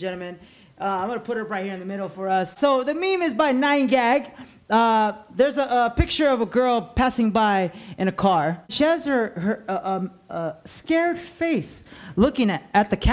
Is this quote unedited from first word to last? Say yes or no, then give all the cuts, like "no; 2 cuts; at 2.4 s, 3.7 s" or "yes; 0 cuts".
no; 2 cuts; at 2.6 s, 8.7 s